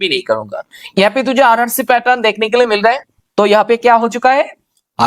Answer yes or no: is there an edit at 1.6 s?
no